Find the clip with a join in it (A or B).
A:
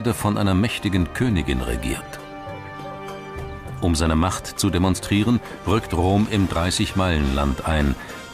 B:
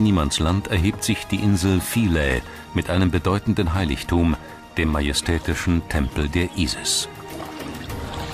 B